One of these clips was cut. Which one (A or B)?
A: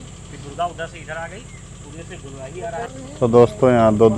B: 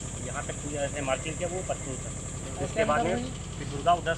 A